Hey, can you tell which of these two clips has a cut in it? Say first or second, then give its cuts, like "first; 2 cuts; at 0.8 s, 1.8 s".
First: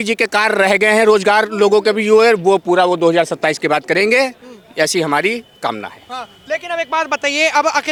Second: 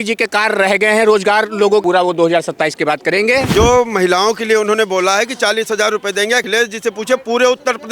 second; 3 cuts; at 1.8 s, 3.5 s, 6.5 s